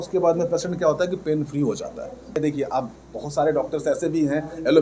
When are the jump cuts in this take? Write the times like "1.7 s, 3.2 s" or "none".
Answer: 2.4 s